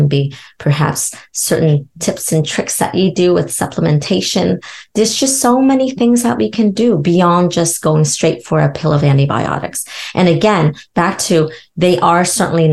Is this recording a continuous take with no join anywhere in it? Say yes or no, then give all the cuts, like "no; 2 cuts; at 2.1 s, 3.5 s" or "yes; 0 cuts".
yes; 0 cuts